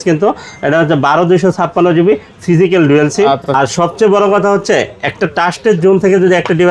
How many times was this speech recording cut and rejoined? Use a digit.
1